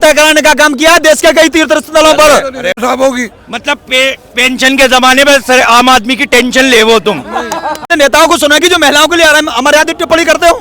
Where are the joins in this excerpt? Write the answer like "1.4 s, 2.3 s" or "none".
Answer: 2.8 s, 7.9 s